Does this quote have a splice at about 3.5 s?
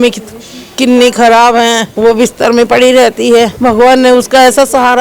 yes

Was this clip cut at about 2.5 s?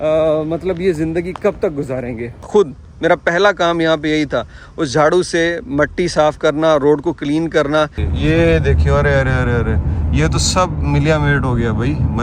yes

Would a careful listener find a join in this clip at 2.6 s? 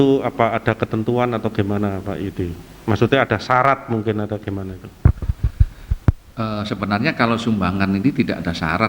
no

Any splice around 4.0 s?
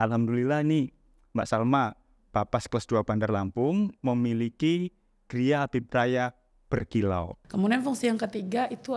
no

